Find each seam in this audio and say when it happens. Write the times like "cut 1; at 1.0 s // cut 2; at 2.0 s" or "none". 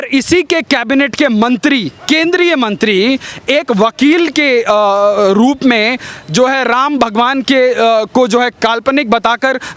none